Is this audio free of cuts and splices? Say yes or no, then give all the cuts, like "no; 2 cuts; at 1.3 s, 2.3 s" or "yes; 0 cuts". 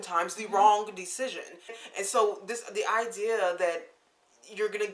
no; 1 cut; at 1.8 s